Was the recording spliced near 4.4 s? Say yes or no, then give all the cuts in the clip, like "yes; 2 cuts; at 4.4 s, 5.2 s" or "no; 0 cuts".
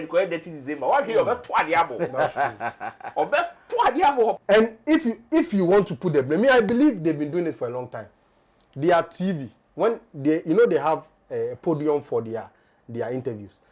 yes; 1 cut; at 4.4 s